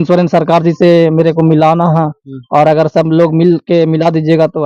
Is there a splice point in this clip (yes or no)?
no